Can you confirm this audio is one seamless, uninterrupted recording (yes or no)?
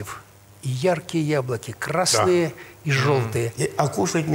yes